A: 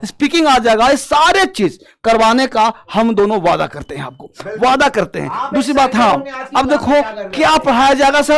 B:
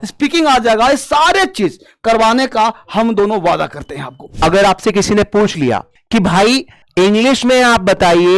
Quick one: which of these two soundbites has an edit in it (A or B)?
B